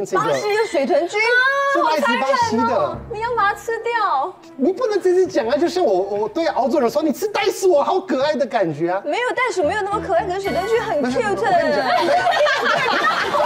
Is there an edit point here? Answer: no; 0 cuts

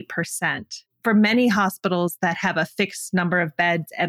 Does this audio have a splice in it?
no; 0 cuts

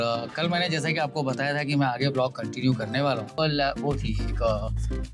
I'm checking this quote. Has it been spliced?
yes; 1 cut; at 3.4 s

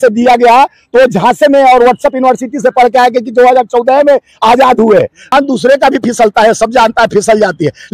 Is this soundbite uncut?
no; 1 cut; at 5.3 s

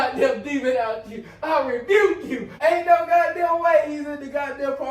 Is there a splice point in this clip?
yes; 1 cut; at 2.5 s

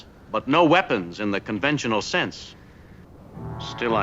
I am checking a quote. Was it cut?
yes; 1 cut; at 3.1 s

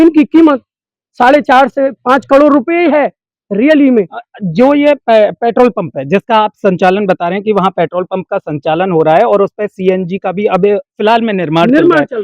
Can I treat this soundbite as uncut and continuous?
yes; 0 cuts

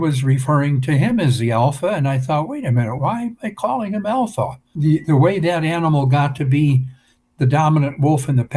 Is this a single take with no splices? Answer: no; 1 cut; at 4.7 s

